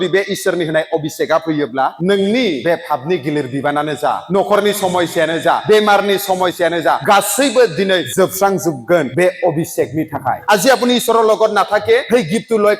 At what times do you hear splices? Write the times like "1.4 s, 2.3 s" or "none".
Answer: 2.0 s, 2.6 s, 4.2 s, 5.6 s, 7.0 s, 8.1 s, 9.1 s, 10.4 s, 12.0 s

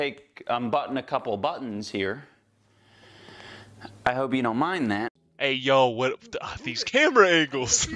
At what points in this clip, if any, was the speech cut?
5.2 s

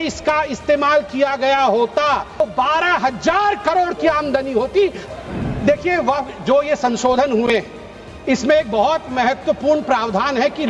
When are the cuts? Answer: 2.4 s, 5.0 s

